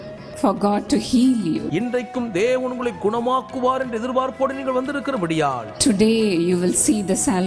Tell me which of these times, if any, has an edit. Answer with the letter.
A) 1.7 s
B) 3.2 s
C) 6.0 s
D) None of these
A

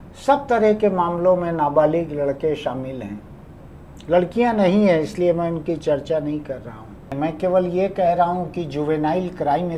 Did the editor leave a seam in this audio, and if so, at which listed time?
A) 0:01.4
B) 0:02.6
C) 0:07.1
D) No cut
C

